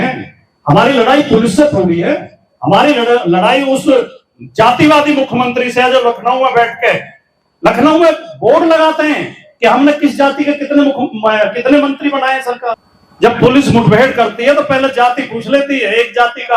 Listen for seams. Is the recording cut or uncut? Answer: cut